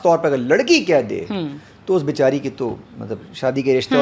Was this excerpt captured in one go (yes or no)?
yes